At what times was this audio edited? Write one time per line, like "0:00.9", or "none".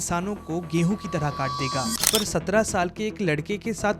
0:02.1

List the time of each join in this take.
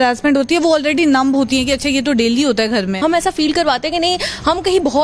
0:03.0

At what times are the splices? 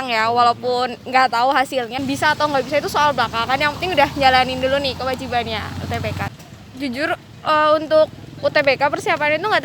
0:02.0
0:06.4

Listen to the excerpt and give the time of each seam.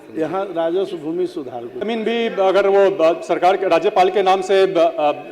0:01.7

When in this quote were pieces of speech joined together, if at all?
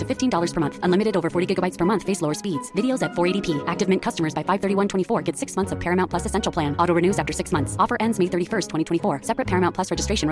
none

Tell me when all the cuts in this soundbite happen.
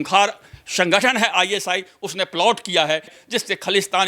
0:03.1

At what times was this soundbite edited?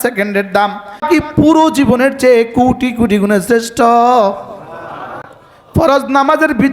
0:01.0

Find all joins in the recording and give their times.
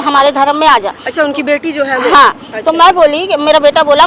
none

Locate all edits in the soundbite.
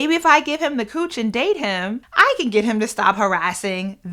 0:02.0

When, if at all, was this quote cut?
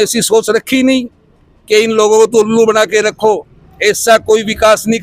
none

